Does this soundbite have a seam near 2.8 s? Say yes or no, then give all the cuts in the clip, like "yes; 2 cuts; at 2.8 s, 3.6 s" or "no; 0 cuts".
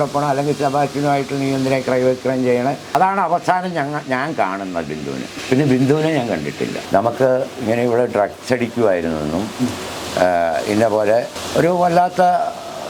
yes; 3 cuts; at 2.8 s, 6.8 s, 11.4 s